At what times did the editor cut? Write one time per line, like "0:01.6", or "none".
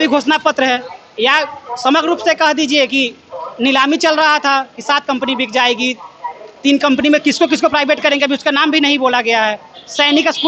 none